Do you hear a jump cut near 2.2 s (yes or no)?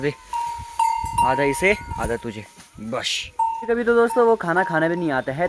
no